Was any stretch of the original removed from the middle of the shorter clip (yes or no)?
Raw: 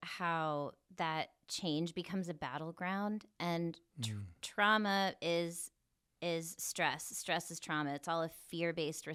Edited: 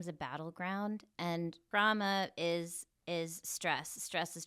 yes